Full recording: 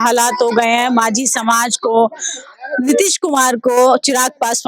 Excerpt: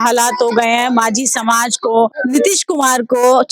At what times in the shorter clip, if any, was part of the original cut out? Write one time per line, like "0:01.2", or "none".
0:02.2

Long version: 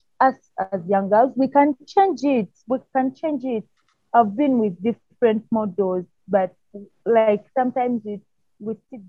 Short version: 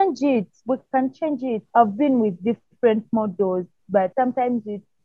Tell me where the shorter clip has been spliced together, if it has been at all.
0:01.6
0:04.1

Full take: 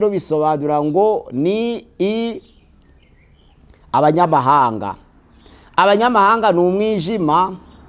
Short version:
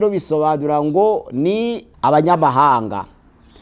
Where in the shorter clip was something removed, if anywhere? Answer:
0:01.8

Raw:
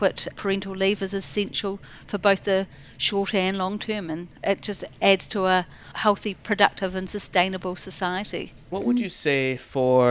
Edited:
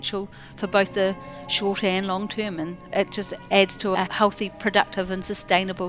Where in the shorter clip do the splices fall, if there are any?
0:03.9

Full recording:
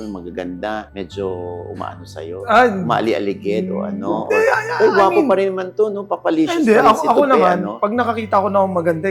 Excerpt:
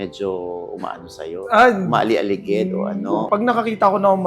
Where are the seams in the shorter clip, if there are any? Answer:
0:03.2

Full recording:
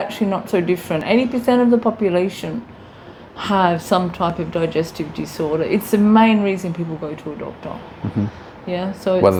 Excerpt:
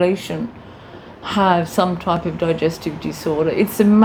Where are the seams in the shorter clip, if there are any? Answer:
none

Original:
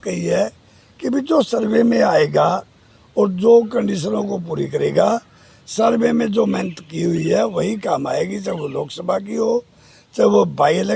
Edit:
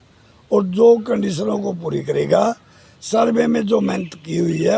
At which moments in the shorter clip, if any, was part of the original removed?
none

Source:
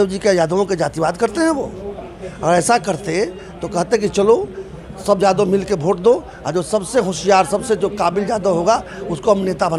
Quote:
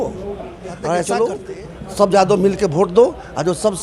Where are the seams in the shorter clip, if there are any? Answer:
0:00.9

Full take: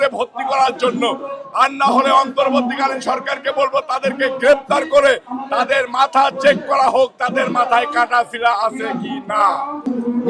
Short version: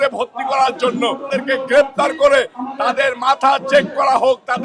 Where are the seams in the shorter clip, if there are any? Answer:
0:01.2

